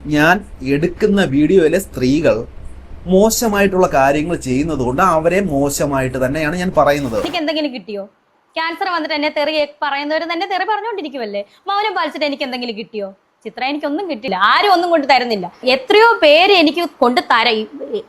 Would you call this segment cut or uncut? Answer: cut